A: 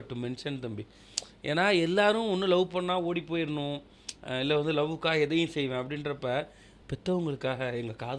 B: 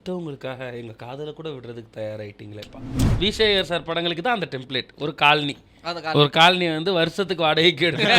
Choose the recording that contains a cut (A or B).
B